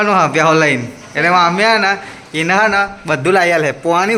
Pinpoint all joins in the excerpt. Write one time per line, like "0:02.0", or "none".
none